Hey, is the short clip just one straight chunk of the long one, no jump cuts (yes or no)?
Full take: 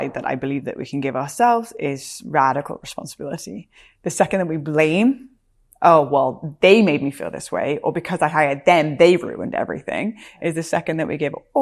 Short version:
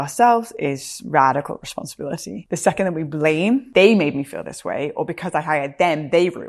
no